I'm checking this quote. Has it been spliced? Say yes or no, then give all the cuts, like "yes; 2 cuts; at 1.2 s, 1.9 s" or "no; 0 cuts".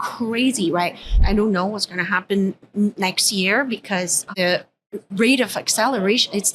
yes; 2 cuts; at 1.2 s, 4.3 s